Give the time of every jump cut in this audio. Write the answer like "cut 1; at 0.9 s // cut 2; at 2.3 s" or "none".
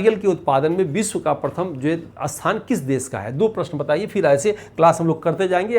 none